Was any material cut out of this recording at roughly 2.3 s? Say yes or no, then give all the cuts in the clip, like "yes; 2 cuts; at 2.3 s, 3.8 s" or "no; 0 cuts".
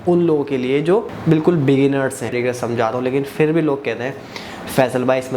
yes; 1 cut; at 2.3 s